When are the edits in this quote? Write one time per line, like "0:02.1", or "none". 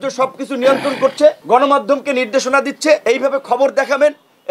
0:01.4
0:03.0